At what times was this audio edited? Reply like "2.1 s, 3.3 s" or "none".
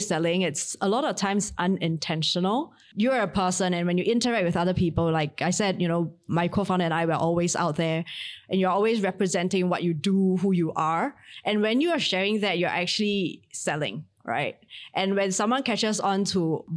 2.8 s